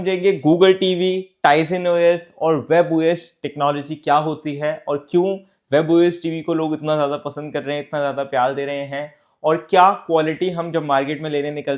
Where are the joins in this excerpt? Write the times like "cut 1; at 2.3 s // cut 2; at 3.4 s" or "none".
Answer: none